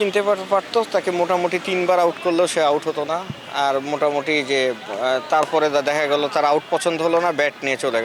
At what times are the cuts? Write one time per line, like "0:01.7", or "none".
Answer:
none